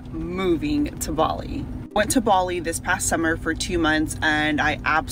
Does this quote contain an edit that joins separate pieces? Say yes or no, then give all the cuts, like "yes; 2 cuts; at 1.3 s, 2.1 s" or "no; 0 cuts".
no; 0 cuts